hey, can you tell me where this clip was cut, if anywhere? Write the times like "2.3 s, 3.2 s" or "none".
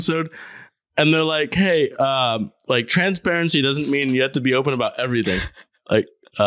none